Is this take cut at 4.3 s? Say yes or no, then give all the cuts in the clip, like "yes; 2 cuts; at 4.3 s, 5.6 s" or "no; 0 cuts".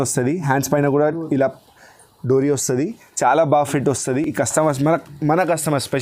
no; 0 cuts